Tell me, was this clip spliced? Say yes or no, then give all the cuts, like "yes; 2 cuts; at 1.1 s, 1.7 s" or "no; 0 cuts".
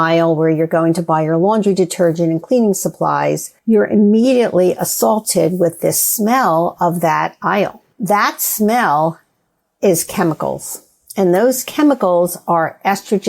yes; 2 cuts; at 3.5 s, 7.9 s